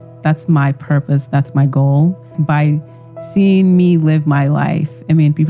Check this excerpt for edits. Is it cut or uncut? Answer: cut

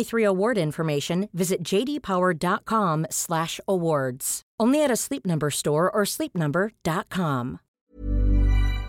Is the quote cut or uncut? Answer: cut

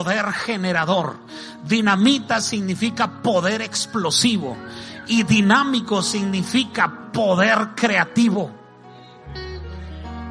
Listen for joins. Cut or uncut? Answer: uncut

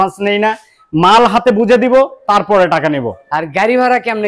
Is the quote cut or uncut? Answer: uncut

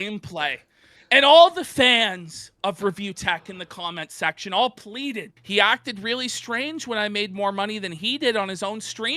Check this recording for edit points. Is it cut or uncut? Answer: cut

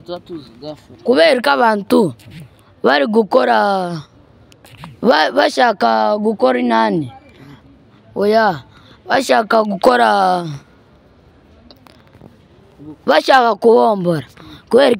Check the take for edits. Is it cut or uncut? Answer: uncut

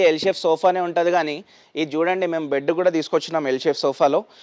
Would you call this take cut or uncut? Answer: uncut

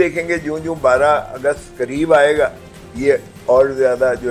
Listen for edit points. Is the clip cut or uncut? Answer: uncut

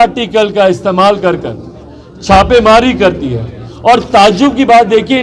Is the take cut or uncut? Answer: uncut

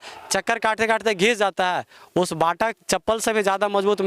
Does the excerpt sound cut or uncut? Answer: uncut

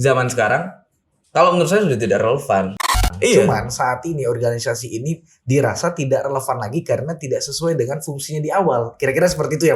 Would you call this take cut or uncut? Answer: cut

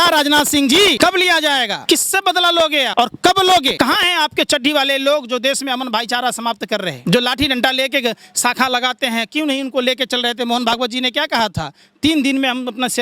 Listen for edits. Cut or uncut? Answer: cut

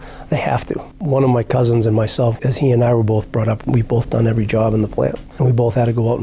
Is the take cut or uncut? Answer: cut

